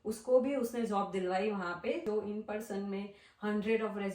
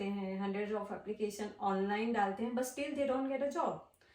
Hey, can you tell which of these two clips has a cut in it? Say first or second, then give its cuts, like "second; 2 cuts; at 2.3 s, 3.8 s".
first; 1 cut; at 2.0 s